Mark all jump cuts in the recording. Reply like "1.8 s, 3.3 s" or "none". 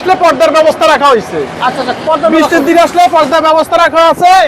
none